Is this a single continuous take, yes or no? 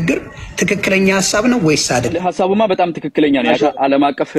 no